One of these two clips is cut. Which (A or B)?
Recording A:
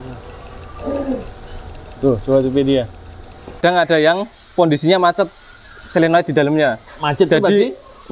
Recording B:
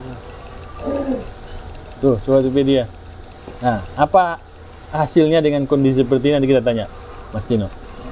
A